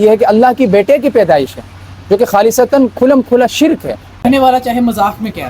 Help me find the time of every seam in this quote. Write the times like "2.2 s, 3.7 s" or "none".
4.2 s

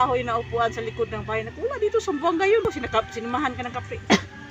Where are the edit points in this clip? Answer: 2.7 s

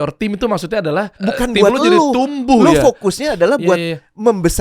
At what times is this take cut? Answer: 1.1 s

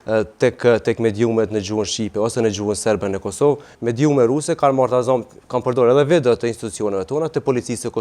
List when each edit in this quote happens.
3.7 s

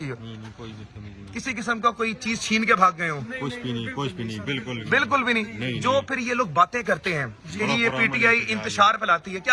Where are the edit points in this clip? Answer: none

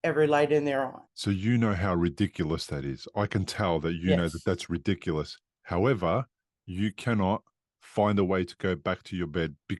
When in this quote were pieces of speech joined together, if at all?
1.0 s

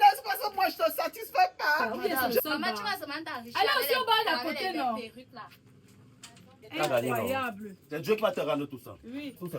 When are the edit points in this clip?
2.4 s

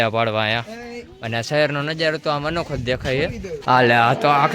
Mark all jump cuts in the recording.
3.5 s

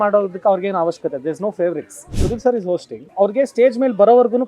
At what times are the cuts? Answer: 2.1 s, 3.0 s

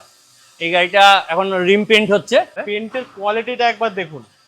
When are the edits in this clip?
2.6 s

